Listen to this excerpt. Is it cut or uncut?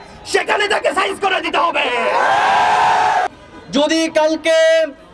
cut